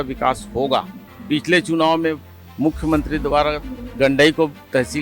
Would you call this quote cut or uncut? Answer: cut